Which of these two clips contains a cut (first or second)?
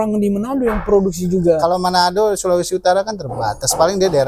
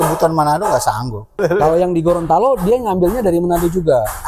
second